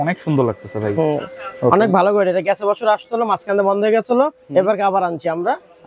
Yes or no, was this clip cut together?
no